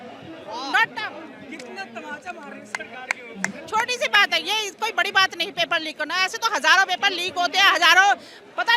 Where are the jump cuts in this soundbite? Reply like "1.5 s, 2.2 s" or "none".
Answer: none